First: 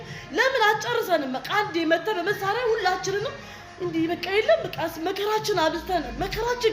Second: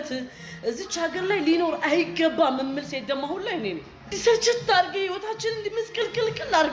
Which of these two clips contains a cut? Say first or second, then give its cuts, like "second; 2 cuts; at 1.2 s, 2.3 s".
second; 1 cut; at 4.1 s